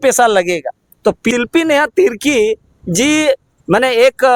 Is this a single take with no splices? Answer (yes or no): no